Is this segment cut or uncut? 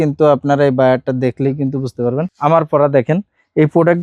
cut